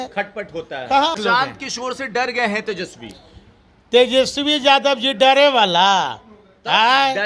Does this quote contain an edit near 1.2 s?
yes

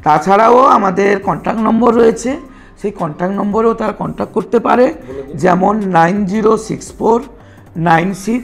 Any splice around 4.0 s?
no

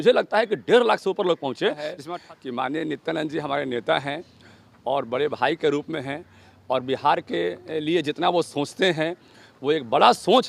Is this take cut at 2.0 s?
yes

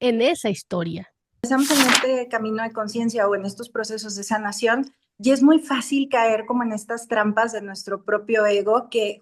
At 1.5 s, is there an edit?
yes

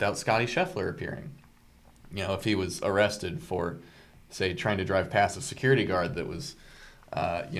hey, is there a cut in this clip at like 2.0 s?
no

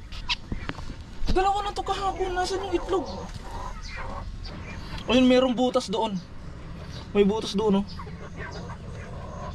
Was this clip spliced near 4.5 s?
yes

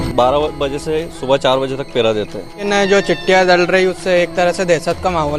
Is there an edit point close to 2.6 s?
yes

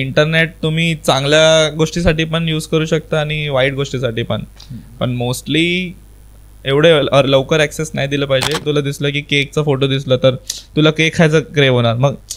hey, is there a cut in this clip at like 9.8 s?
no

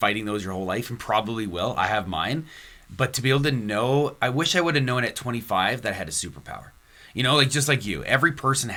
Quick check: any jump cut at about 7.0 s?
no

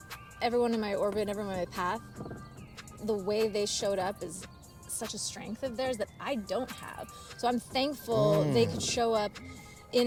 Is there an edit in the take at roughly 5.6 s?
no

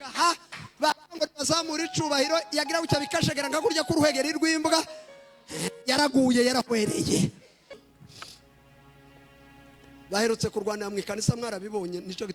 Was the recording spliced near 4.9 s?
no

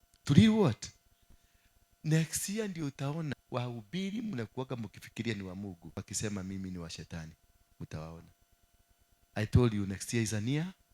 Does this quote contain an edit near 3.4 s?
yes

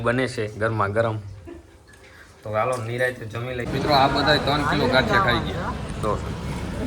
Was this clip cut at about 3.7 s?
yes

